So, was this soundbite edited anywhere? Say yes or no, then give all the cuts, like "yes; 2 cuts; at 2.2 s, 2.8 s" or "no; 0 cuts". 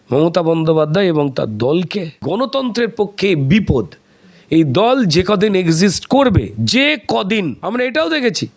yes; 2 cuts; at 2.1 s, 7.6 s